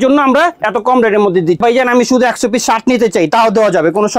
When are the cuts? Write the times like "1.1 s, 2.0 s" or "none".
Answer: 1.6 s